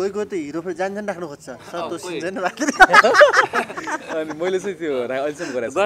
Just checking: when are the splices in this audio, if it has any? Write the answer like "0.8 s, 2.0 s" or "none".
none